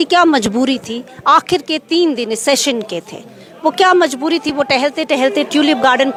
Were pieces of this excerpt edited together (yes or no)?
no